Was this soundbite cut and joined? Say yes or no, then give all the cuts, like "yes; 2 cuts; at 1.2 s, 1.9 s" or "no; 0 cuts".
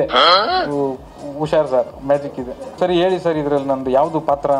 yes; 1 cut; at 2.8 s